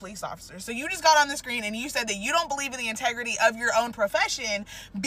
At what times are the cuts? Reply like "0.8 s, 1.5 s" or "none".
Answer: none